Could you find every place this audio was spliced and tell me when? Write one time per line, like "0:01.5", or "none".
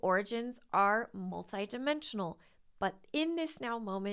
none

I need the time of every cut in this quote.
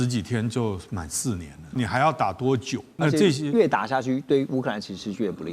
0:01.7
0:02.8

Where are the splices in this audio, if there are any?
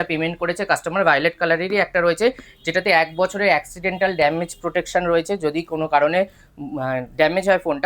none

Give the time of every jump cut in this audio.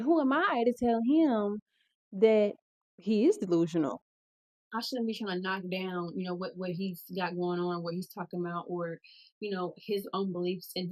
0:04.0

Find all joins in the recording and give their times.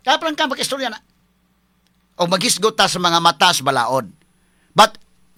none

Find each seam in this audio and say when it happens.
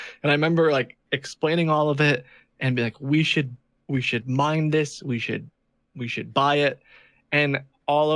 none

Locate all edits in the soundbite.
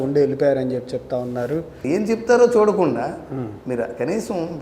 0:01.8

